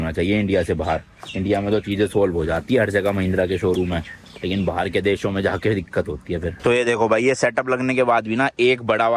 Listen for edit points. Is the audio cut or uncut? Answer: cut